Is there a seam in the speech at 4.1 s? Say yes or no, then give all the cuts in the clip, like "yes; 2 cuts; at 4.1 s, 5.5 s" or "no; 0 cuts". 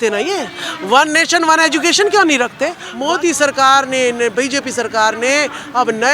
no; 1 cut; at 2.9 s